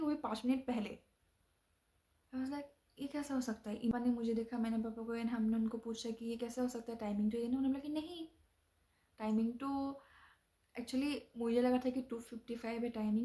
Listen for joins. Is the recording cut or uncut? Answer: uncut